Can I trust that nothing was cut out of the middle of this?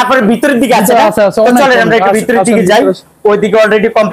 yes; 0 cuts

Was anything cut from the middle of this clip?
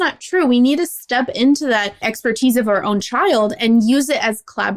no; 0 cuts

